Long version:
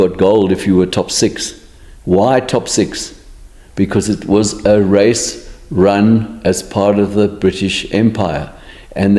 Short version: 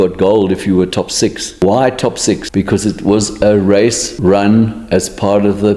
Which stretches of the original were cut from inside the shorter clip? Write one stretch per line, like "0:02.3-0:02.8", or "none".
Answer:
0:01.4-0:01.9
0:03.0-0:03.7
0:05.3-0:05.6